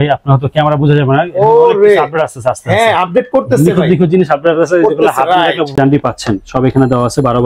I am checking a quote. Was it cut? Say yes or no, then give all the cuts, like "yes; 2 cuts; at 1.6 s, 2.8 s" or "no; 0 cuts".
yes; 1 cut; at 5.8 s